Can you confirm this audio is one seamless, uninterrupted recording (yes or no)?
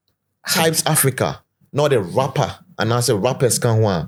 yes